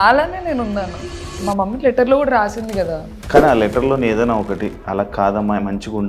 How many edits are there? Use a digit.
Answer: 1